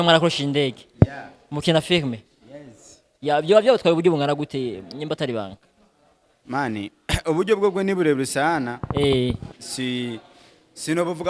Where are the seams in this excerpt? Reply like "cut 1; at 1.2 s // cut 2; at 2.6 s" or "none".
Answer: cut 1; at 9.6 s